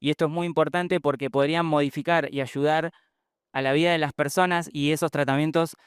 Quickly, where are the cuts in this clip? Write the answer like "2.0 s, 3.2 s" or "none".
4.7 s